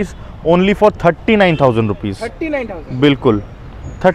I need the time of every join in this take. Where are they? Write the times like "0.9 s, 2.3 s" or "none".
none